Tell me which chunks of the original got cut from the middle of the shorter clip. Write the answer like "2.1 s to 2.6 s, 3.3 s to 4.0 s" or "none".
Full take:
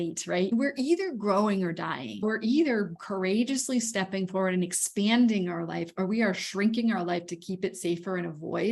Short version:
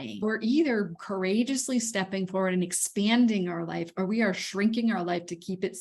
none